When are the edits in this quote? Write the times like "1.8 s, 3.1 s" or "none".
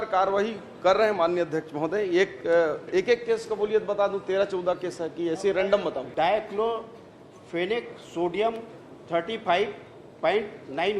6.1 s